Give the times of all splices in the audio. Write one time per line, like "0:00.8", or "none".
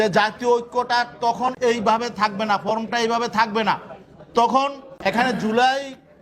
0:01.6
0:04.9